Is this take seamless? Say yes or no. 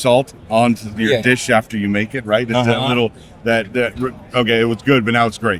yes